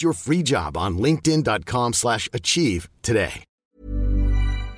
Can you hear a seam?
yes; 1 cut; at 3.6 s

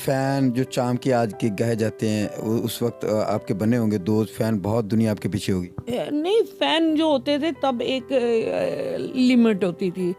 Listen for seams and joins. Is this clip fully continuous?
yes; 0 cuts

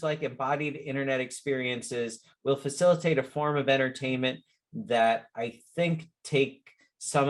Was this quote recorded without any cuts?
yes; 0 cuts

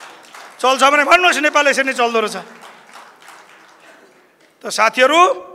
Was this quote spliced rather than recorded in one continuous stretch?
no; 0 cuts

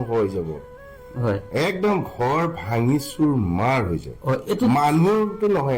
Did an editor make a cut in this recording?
no; 0 cuts

